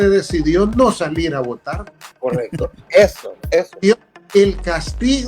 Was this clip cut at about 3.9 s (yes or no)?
yes